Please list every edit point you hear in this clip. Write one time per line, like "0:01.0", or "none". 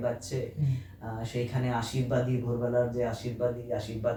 none